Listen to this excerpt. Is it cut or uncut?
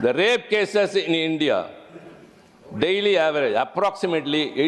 uncut